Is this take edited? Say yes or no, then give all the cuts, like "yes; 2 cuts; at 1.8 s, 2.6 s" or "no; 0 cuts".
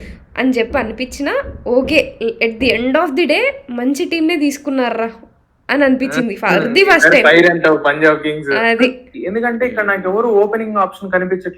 yes; 1 cut; at 9.1 s